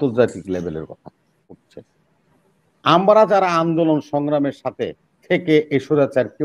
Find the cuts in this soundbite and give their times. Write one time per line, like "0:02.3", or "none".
0:01.5